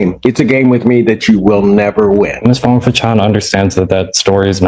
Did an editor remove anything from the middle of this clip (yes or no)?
yes